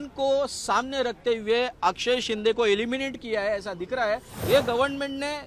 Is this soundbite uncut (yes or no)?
no